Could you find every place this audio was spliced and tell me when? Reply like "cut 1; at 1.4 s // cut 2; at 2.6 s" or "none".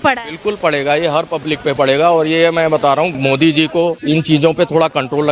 cut 1; at 3.1 s // cut 2; at 4.0 s